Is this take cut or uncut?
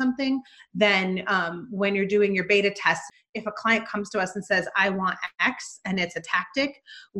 cut